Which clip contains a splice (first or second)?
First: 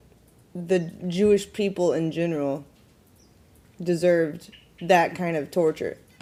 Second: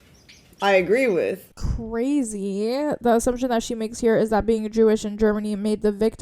second